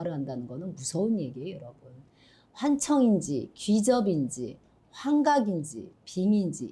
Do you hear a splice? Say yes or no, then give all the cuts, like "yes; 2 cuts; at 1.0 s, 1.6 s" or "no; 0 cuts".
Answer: no; 0 cuts